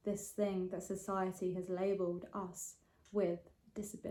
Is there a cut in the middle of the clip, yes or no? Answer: no